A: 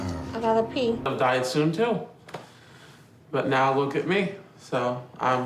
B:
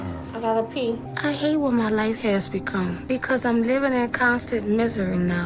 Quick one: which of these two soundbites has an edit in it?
A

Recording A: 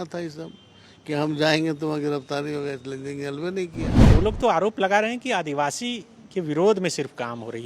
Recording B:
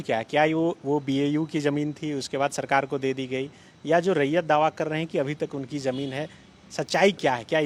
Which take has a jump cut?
A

